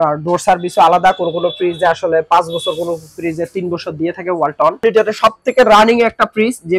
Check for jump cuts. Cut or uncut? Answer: cut